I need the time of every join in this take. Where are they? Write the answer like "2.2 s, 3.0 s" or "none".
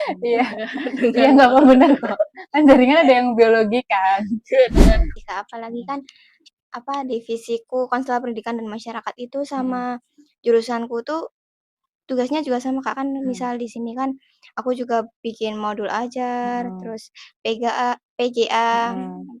5.1 s